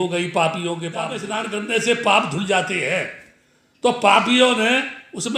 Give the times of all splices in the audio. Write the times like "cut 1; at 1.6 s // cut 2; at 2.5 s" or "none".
cut 1; at 1.3 s